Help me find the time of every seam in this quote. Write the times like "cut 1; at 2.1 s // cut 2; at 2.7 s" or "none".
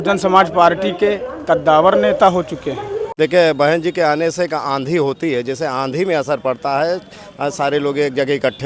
cut 1; at 3.1 s